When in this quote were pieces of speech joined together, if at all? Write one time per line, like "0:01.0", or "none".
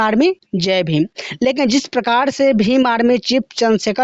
none